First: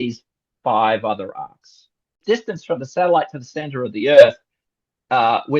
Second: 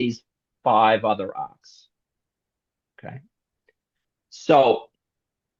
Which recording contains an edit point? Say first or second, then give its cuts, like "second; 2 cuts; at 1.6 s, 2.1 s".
first; 1 cut; at 2.2 s